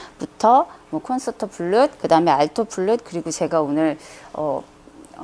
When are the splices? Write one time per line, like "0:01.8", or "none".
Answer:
0:01.2

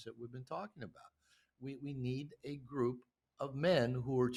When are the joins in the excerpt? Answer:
none

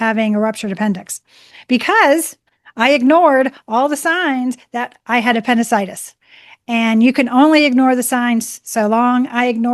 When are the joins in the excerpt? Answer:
none

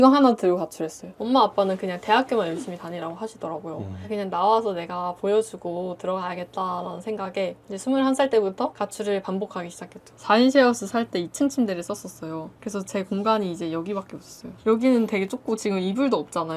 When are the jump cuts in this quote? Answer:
0:01.2
0:10.1

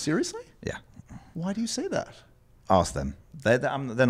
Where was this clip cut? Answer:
none

